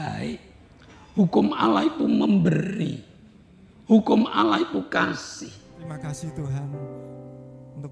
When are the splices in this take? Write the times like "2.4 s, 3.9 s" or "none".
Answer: 5.8 s